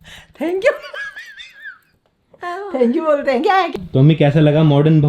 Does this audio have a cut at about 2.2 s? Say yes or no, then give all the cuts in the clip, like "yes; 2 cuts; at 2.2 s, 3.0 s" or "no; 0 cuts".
no; 1 cut; at 3.7 s